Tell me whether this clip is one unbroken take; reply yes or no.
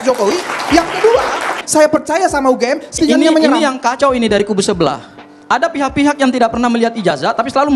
no